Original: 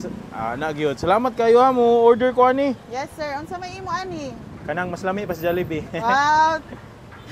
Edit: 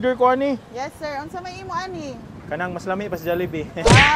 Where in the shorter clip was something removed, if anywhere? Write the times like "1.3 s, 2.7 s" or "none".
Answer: none

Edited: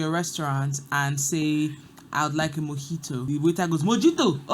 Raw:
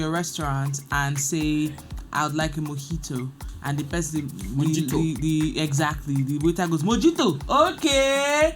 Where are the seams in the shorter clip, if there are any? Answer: 3.3 s

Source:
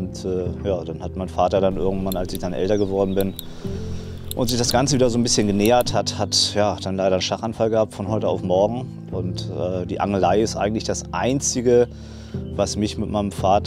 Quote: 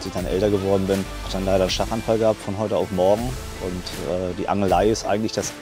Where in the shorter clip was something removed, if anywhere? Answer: 1.3 s

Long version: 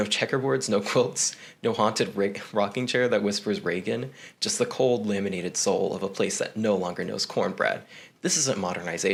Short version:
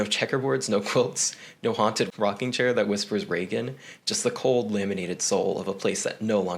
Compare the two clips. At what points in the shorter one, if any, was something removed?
2.1 s

